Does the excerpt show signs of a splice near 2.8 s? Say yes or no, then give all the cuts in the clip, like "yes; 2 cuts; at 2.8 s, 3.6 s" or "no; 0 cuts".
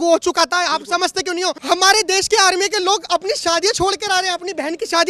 no; 1 cut; at 1.6 s